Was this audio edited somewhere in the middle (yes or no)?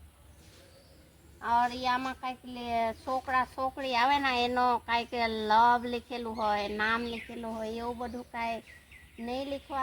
no